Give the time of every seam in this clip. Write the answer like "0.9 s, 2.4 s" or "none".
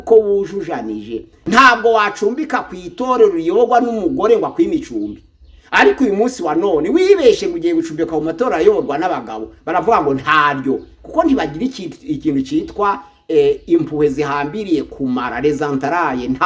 1.2 s